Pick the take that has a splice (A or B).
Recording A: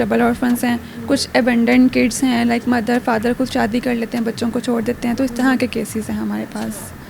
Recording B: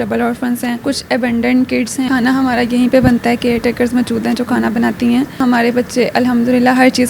B